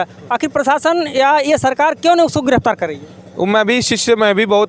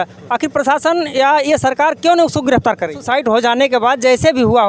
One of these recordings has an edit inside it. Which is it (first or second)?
second